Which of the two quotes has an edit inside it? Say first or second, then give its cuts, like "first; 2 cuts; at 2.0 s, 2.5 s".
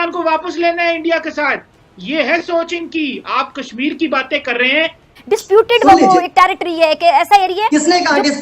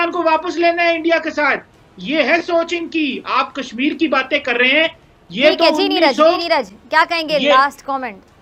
first; 1 cut; at 5.1 s